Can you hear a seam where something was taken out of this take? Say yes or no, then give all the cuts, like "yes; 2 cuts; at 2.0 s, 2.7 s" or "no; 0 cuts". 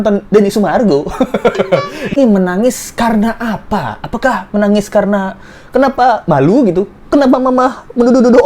yes; 1 cut; at 2.2 s